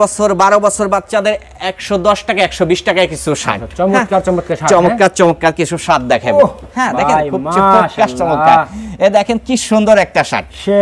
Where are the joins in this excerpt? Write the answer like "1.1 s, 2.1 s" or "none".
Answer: none